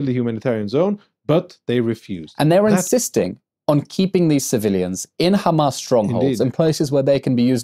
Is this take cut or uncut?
cut